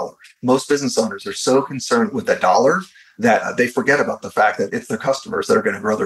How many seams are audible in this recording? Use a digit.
1